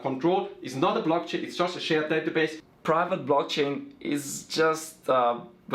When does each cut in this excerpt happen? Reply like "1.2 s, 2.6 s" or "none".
2.6 s